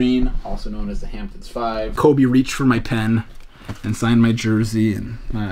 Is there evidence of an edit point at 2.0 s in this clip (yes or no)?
yes